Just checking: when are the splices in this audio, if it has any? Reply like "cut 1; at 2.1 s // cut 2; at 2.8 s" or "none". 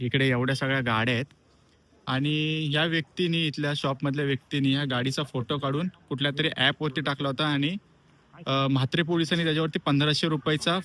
none